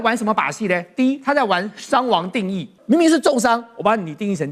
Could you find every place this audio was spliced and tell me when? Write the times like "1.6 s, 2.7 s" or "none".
2.7 s

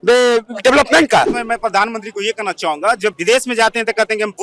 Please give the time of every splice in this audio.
1.4 s, 3.2 s

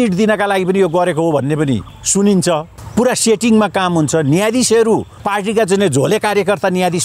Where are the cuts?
1.9 s, 2.8 s, 5.2 s

